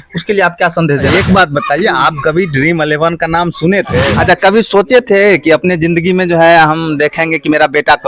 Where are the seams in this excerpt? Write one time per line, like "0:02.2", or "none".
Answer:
0:01.1
0:04.1